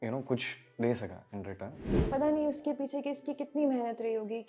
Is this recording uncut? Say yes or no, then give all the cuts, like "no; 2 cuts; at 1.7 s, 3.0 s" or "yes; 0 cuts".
no; 1 cut; at 2.0 s